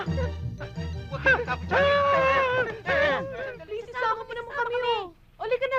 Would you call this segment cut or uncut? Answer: cut